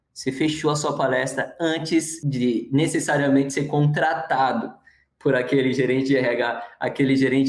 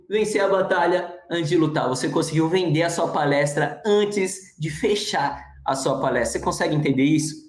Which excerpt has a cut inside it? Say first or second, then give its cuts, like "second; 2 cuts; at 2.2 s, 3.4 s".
first; 1 cut; at 2.2 s